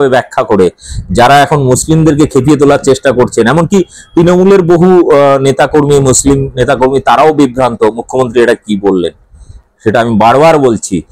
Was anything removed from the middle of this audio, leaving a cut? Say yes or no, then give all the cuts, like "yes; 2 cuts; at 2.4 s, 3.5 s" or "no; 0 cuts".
no; 0 cuts